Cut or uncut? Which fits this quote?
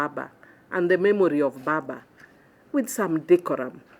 uncut